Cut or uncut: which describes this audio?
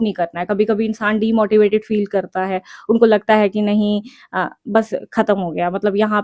uncut